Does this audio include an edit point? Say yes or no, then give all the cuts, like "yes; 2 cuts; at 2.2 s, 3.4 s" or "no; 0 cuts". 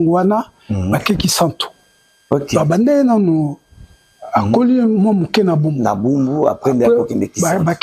no; 0 cuts